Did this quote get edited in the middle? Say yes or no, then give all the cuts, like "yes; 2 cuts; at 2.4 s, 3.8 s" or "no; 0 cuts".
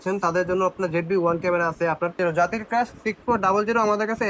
yes; 1 cut; at 2.2 s